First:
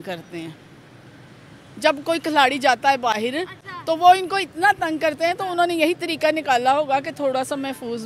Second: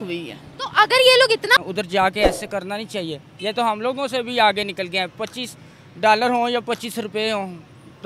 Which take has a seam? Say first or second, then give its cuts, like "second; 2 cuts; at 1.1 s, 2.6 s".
second; 1 cut; at 1.6 s